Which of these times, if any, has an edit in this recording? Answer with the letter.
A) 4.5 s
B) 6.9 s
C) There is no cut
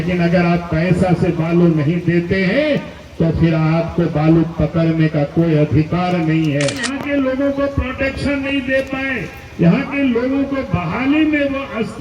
B